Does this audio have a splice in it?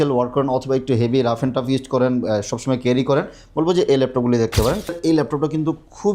yes; 1 cut; at 4.9 s

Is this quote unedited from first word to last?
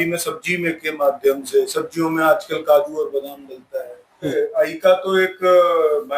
no; 1 cut; at 4.3 s

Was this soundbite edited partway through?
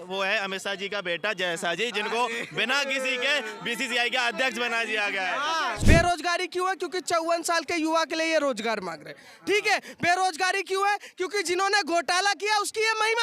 yes; 1 cut; at 5.8 s

